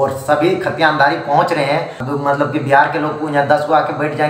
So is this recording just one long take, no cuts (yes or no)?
no